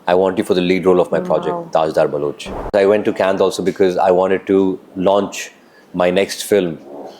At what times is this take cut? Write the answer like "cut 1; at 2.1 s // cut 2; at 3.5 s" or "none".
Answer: cut 1; at 2.7 s